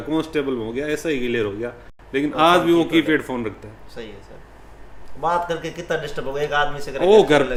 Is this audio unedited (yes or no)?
yes